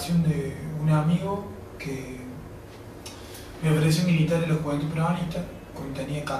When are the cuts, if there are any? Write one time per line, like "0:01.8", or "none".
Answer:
0:02.3